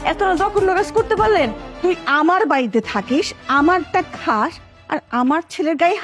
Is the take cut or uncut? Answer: cut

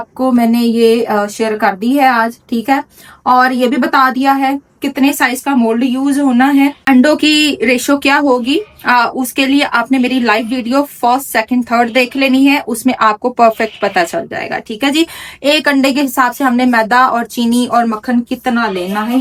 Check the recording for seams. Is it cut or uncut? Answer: uncut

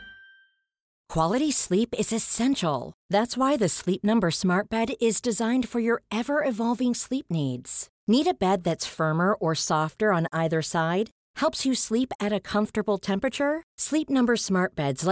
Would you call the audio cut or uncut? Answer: cut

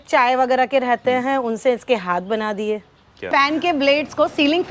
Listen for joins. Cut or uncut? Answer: cut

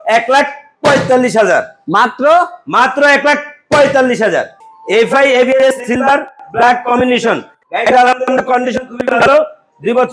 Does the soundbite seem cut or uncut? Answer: uncut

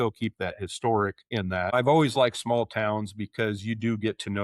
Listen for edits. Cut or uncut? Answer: cut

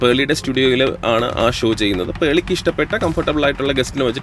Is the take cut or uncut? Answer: uncut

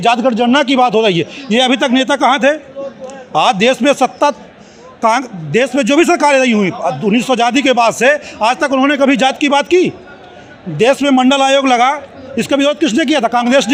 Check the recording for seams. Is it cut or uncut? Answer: uncut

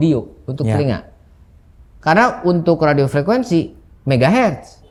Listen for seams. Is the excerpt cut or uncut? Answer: uncut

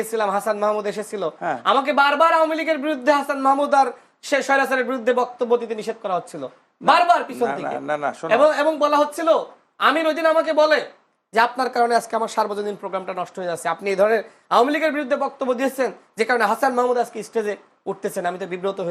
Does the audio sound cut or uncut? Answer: uncut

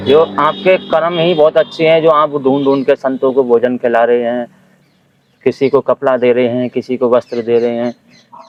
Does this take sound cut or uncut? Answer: uncut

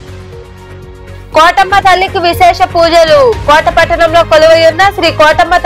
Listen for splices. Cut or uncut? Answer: cut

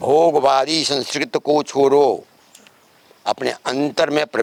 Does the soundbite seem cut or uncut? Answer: uncut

